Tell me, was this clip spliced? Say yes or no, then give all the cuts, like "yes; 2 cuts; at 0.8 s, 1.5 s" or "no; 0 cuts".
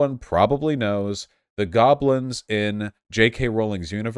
yes; 1 cut; at 3.0 s